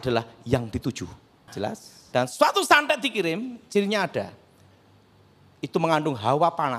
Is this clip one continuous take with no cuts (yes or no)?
no